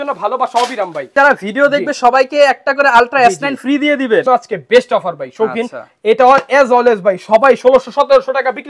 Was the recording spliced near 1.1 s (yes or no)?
yes